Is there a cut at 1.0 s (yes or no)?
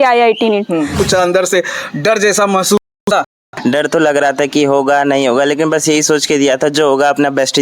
yes